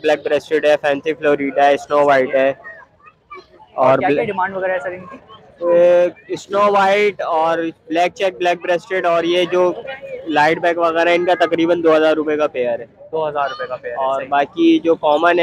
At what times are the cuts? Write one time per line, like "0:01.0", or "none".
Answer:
none